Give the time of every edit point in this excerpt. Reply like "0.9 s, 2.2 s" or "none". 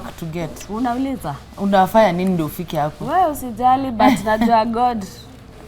none